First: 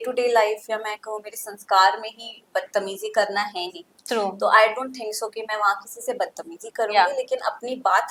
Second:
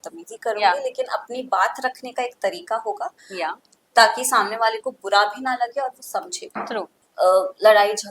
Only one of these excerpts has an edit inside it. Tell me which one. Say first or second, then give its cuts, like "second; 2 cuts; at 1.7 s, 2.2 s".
second; 1 cut; at 7.0 s